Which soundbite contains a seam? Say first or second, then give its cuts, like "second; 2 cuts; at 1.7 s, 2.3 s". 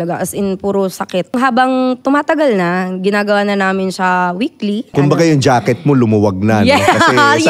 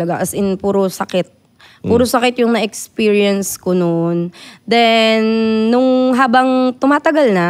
first; 2 cuts; at 1.3 s, 4.9 s